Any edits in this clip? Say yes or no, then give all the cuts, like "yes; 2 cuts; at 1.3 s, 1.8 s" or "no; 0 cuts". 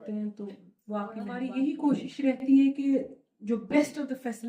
yes; 1 cut; at 1.5 s